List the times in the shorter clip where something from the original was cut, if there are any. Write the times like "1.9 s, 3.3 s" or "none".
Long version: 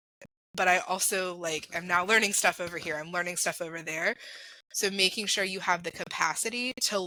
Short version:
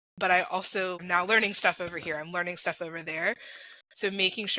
1.0 s